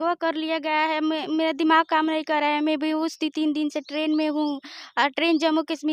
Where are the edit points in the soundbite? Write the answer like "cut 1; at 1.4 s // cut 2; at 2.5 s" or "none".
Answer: none

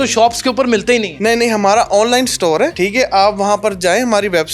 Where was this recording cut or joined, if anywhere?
cut 1; at 1.1 s // cut 2; at 2.7 s

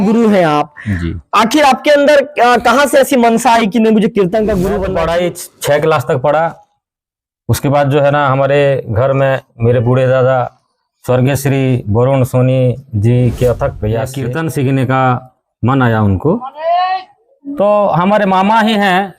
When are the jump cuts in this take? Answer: cut 1; at 4.8 s // cut 2; at 14.2 s

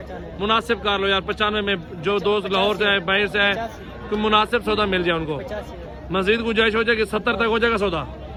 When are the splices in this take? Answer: none

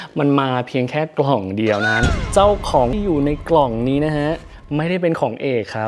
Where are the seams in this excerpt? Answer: cut 1; at 2.1 s // cut 2; at 2.9 s

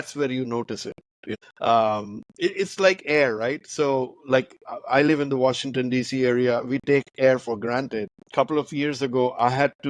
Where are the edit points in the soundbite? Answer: cut 1; at 1.2 s // cut 2; at 8.2 s

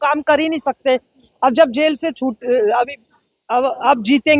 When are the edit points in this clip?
none

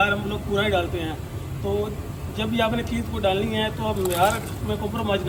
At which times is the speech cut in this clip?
none

